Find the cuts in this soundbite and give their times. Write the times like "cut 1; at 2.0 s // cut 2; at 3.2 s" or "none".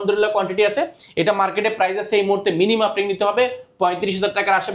none